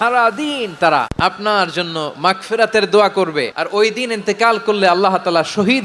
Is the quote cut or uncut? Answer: cut